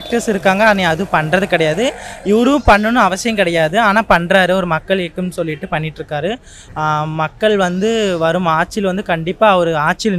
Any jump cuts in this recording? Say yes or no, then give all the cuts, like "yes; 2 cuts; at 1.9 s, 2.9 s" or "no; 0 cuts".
no; 0 cuts